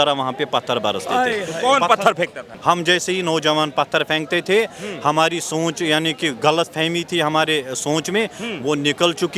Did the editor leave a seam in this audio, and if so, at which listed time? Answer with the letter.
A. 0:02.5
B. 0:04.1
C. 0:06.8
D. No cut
A